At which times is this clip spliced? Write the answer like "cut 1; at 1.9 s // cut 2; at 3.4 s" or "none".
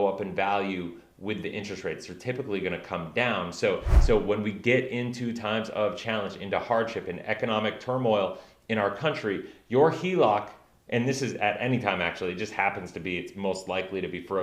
cut 1; at 3.9 s